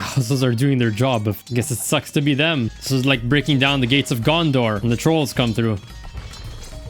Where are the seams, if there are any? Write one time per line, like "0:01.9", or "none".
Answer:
0:01.4
0:02.8
0:04.8